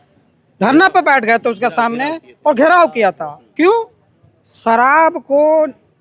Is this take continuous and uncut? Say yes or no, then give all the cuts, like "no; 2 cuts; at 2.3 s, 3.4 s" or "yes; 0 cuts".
yes; 0 cuts